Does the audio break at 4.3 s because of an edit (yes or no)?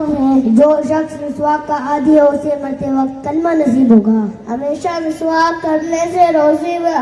no